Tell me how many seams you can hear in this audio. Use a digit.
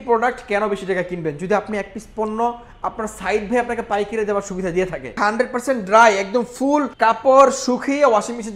2